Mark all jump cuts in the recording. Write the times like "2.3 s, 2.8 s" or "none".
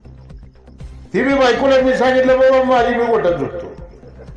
1.0 s